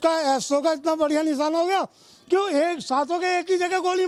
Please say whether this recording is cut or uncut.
uncut